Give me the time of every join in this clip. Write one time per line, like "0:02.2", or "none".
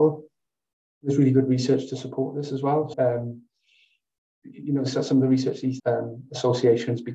0:02.9
0:05.8